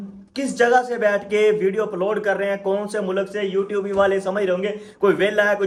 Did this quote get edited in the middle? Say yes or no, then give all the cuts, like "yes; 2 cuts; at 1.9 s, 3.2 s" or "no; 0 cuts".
no; 0 cuts